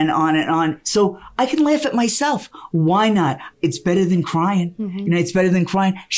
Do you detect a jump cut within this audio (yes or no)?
no